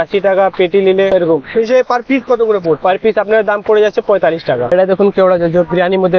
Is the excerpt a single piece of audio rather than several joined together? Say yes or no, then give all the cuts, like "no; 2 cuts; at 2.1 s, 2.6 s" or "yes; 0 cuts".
no; 2 cuts; at 1.1 s, 4.7 s